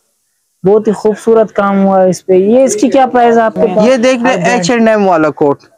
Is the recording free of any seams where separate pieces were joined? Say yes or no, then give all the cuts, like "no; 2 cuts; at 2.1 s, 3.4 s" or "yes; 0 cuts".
no; 1 cut; at 3.8 s